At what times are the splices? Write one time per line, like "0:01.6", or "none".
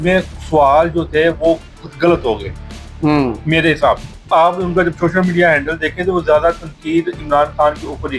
0:04.3